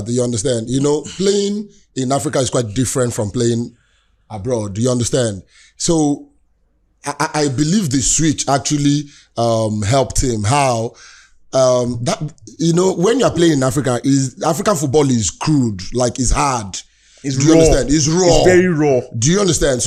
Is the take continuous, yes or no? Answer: yes